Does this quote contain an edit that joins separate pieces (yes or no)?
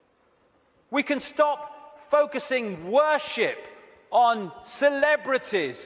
yes